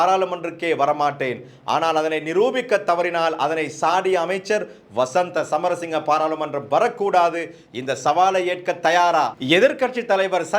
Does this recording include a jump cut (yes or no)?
yes